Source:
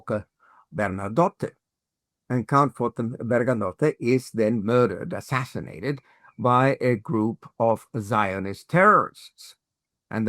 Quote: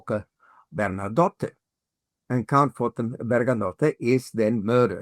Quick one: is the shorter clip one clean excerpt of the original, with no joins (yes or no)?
yes